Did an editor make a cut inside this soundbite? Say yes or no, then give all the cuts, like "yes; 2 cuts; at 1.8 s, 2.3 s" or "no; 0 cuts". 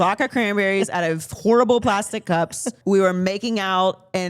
yes; 1 cut; at 2.7 s